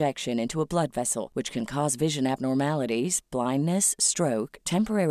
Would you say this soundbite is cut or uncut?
uncut